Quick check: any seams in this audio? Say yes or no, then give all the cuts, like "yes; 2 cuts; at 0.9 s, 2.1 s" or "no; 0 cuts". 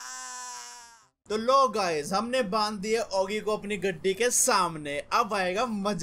yes; 1 cut; at 1.1 s